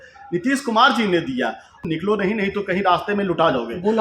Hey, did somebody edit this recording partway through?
yes; 1 cut; at 1.8 s

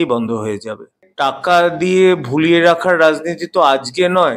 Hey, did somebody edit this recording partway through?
yes; 1 cut; at 1.0 s

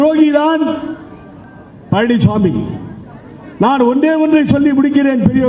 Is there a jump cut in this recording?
no; 0 cuts

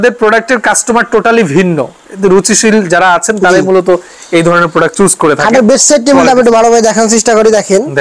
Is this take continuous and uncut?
yes; 0 cuts

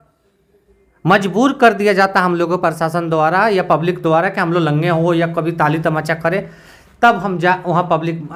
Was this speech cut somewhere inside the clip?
no; 0 cuts

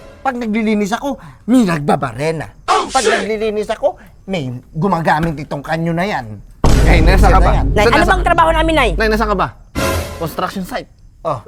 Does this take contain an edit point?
no; 0 cuts

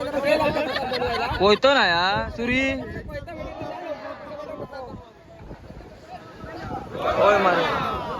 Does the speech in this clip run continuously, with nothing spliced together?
yes; 0 cuts

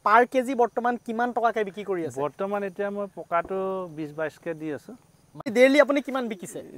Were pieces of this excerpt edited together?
yes; 1 cut; at 5.5 s

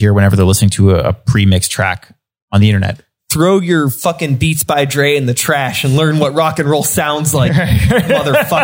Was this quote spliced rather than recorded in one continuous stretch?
no; 0 cuts

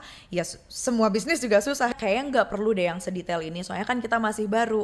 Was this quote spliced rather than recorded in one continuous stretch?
yes; 1 cut; at 1.9 s

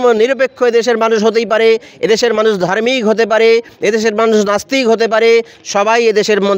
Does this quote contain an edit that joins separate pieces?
no; 0 cuts

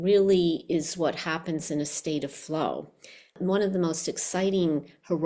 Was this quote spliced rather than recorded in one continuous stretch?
yes; 1 cut; at 3.3 s

